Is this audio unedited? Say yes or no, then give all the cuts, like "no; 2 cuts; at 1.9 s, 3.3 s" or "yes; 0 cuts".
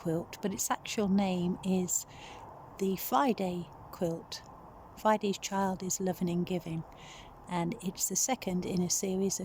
yes; 0 cuts